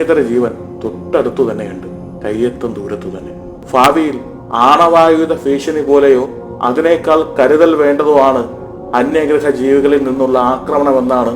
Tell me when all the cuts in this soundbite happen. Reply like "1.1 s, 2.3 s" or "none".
3.6 s

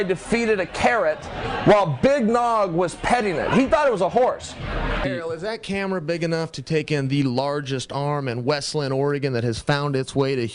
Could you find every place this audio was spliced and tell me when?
5.0 s

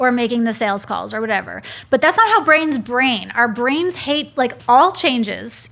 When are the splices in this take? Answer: 4.6 s

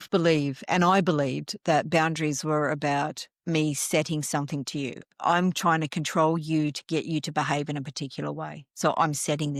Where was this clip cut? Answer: none

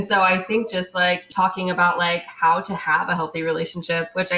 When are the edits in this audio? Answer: 1.3 s

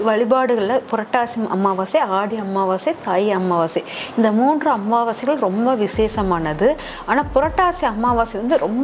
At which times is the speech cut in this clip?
none

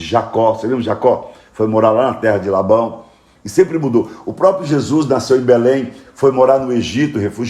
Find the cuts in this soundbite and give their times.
none

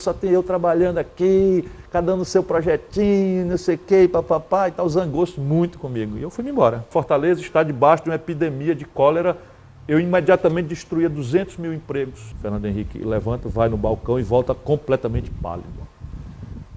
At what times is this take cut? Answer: 6.9 s, 12.2 s

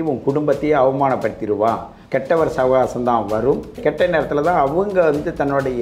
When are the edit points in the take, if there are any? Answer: 1.9 s, 3.8 s

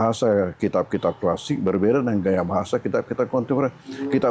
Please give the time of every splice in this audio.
none

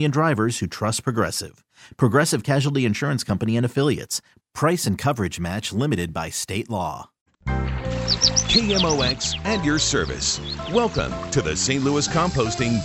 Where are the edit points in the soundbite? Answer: 7.4 s

